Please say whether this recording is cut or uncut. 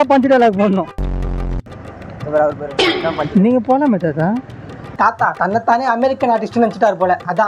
uncut